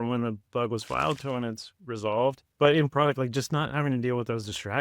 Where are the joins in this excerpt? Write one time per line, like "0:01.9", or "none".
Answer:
0:02.5